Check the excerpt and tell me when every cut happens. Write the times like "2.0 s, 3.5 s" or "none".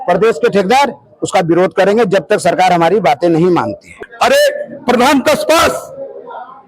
4.0 s